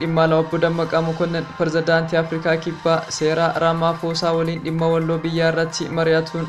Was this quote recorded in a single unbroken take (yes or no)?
yes